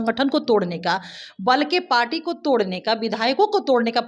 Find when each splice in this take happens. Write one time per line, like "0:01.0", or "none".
none